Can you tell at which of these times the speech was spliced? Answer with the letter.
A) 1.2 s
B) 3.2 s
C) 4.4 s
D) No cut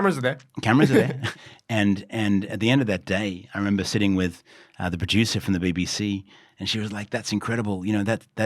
A